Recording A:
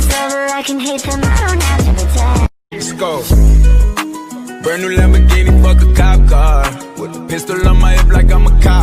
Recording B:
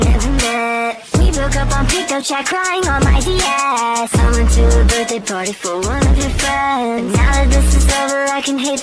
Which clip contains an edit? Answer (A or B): A